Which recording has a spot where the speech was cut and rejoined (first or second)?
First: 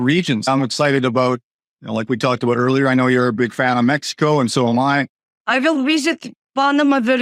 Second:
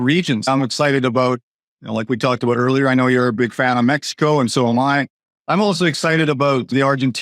second